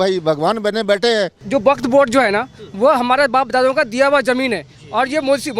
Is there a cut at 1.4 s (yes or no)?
yes